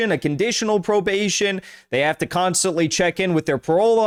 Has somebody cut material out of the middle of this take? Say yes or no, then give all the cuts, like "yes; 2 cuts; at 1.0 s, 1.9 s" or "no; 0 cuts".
no; 0 cuts